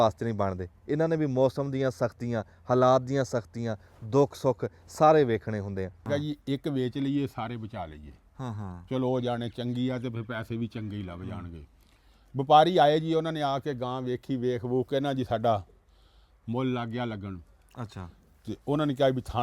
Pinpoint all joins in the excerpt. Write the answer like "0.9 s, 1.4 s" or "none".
6.1 s